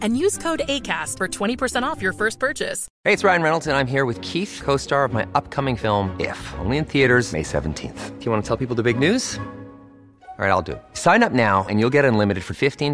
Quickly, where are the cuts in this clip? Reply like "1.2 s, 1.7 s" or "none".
2.9 s